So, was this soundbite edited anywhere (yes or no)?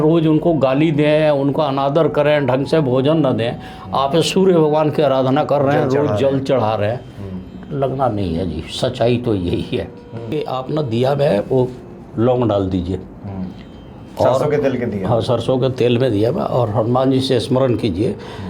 yes